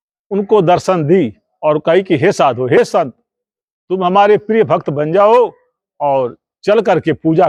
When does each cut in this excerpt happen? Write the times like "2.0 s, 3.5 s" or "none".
none